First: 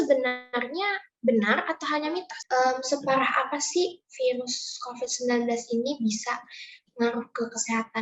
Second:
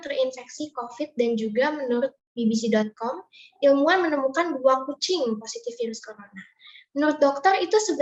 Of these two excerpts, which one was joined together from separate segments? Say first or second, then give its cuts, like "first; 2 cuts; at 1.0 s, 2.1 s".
first; 1 cut; at 2.3 s